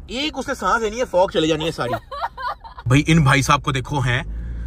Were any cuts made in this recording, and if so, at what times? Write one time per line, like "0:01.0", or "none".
0:02.8